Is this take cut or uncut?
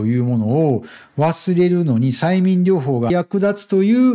cut